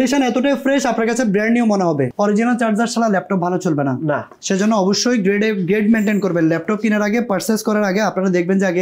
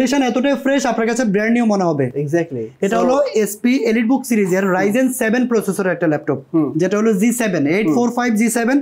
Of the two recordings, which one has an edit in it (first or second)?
first